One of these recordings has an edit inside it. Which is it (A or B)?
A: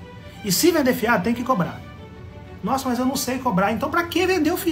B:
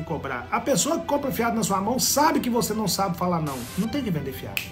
B